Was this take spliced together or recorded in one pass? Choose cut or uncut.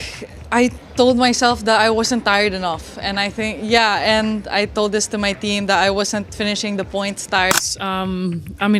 cut